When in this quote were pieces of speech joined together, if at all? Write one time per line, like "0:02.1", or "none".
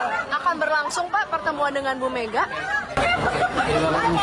none